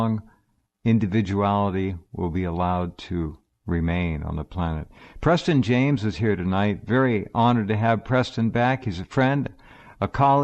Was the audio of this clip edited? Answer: yes; 1 cut; at 5.5 s

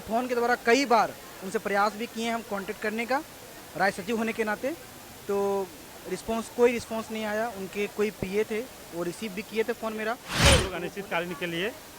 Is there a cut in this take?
yes; 1 cut; at 10.3 s

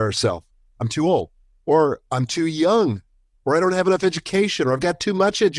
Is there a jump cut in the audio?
no; 0 cuts

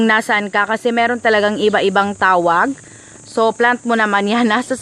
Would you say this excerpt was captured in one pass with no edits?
yes; 0 cuts

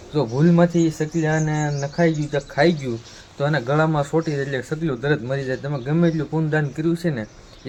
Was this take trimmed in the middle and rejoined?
no; 0 cuts

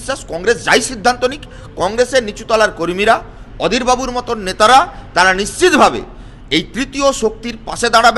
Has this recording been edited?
no; 0 cuts

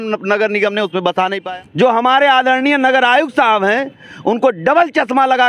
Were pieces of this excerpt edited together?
yes; 1 cut; at 1.4 s

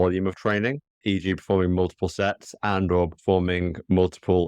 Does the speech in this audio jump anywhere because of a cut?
yes; 1 cut; at 1.0 s

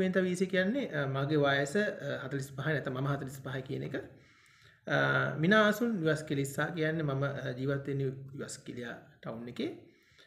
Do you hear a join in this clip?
no; 0 cuts

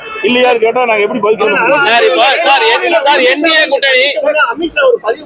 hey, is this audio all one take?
yes; 0 cuts

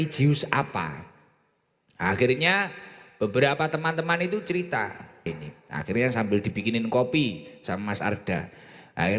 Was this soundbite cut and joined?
yes; 1 cut; at 5.3 s

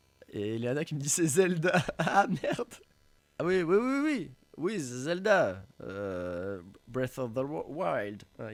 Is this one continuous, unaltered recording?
yes; 0 cuts

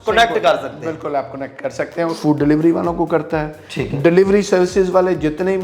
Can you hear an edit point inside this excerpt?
yes; 1 cut; at 2.2 s

